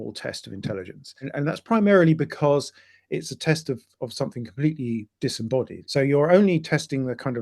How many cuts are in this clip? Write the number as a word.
two